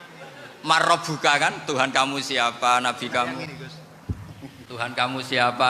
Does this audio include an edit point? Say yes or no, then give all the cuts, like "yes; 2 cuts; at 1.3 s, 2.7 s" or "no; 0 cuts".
yes; 1 cut; at 4.1 s